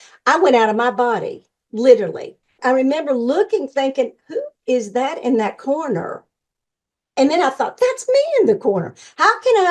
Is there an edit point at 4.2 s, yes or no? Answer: no